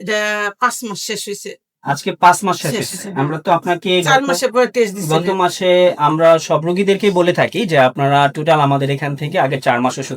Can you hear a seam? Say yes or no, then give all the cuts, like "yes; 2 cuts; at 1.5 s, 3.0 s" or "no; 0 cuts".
no; 0 cuts